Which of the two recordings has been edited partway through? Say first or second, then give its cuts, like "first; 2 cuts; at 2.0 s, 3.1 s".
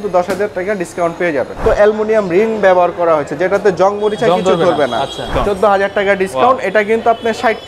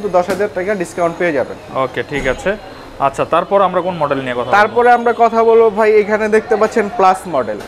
first; 2 cuts; at 1.6 s, 5.3 s